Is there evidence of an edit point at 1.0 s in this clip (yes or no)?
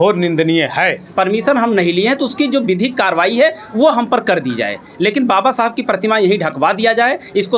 yes